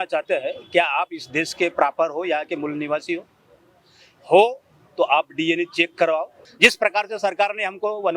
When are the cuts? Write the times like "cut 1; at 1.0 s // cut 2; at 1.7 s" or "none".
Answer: cut 1; at 6.4 s